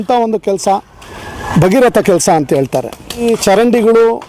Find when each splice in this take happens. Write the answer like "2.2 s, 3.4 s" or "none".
3.2 s